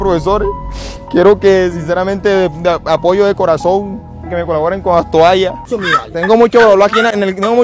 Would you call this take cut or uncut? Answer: cut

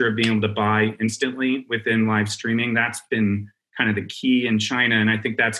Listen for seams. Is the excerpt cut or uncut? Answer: uncut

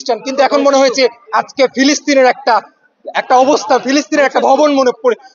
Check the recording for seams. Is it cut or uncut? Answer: uncut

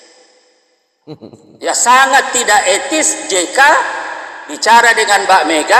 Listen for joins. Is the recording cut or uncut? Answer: uncut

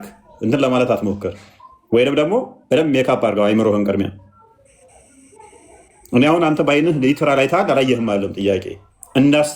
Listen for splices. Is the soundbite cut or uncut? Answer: uncut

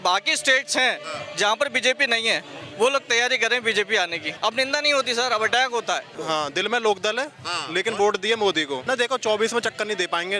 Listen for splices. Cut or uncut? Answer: cut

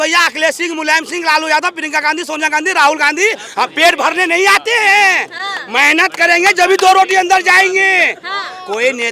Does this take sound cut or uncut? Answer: uncut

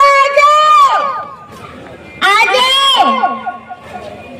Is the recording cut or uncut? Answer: cut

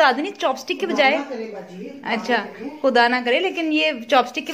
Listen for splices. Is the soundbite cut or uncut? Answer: uncut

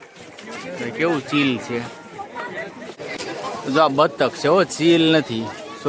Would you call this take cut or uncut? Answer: uncut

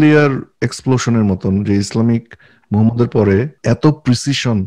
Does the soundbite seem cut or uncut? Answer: cut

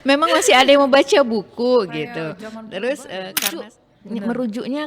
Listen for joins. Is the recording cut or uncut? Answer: cut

